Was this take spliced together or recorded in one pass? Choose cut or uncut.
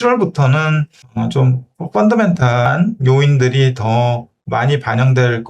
cut